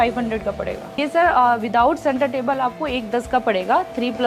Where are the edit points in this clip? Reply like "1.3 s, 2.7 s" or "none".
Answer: 0.9 s